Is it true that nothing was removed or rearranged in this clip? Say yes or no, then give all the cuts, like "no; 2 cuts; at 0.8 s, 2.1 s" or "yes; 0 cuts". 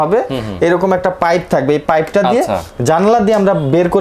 yes; 0 cuts